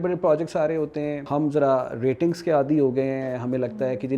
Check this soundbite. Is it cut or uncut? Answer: cut